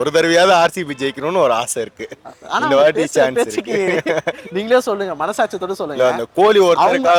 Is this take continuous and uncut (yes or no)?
yes